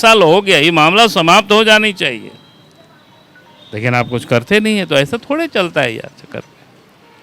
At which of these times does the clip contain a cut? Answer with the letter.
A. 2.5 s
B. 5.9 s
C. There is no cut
C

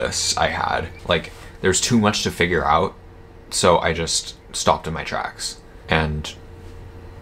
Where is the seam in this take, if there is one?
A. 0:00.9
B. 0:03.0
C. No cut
A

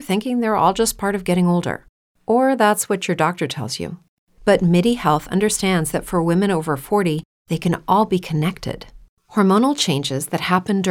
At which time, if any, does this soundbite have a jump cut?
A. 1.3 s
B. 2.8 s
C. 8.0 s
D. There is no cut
D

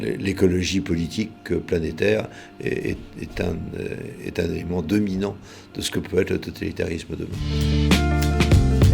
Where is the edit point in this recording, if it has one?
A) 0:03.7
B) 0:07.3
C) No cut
B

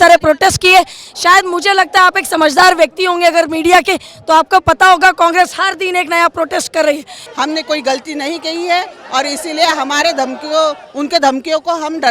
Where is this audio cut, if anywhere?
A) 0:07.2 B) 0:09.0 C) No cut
A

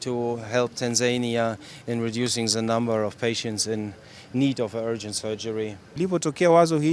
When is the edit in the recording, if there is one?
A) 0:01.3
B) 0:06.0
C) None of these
B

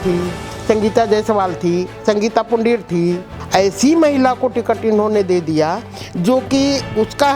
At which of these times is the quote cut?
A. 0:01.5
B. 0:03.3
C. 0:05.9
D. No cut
B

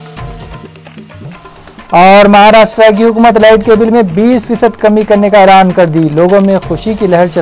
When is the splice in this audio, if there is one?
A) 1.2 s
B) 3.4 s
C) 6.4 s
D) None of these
A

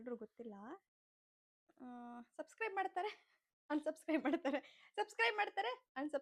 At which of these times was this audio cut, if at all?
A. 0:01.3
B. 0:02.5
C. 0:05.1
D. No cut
D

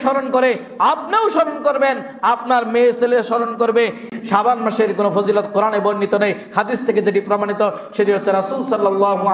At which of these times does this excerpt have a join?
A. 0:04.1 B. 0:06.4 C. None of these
A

